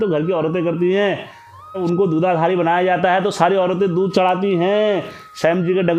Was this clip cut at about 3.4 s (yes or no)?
no